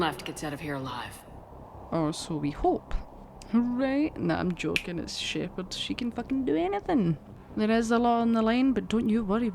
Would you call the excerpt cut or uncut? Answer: uncut